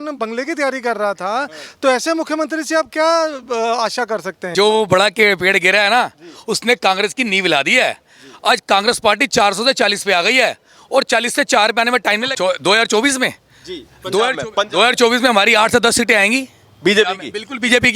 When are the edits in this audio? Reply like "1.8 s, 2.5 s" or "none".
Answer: 4.4 s, 12.3 s